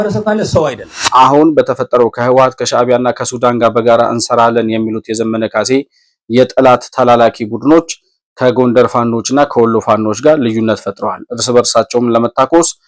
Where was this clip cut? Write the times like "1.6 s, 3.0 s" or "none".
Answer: 0.9 s